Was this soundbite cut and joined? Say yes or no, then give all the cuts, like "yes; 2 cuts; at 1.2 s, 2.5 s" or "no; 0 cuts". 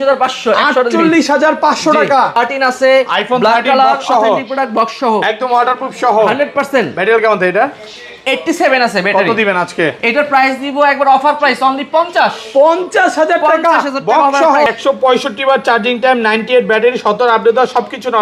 yes; 2 cuts; at 2.3 s, 14.7 s